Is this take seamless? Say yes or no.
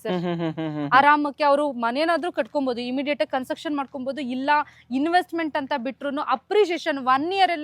yes